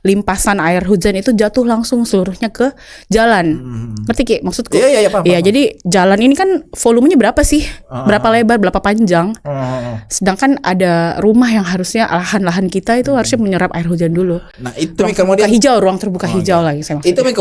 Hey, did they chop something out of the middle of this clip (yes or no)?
no